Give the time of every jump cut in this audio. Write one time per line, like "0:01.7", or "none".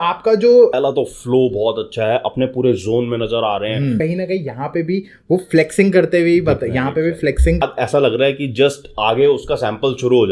0:00.7
0:04.0
0:07.6